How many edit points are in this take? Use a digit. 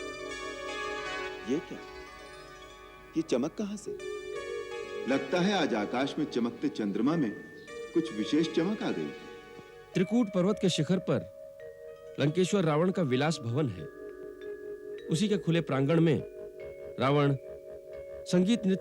1